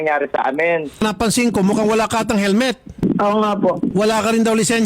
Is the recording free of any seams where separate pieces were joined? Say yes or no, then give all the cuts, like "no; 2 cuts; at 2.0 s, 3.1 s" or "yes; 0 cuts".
no; 3 cuts; at 1.0 s, 2.9 s, 3.9 s